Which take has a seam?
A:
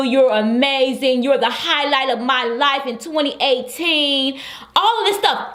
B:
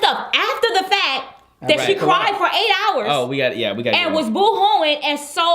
B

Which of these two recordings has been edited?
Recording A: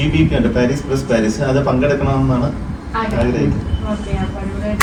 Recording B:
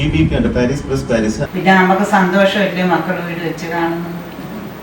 B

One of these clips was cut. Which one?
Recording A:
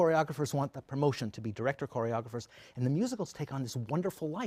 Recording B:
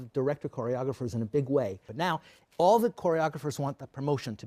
B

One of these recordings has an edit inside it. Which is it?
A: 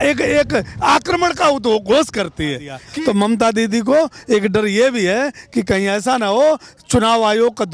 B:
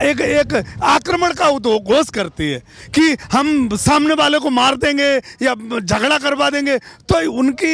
A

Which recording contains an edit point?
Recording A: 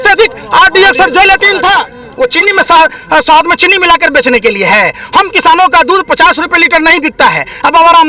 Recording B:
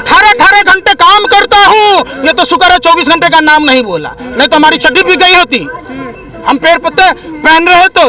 A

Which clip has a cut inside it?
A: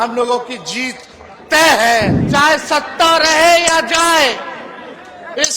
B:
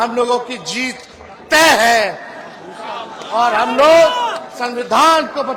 A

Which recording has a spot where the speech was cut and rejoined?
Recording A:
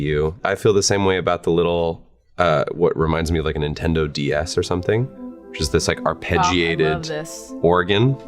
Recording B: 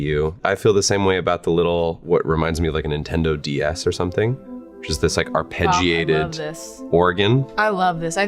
B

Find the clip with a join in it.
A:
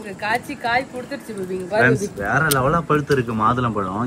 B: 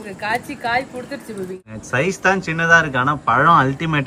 B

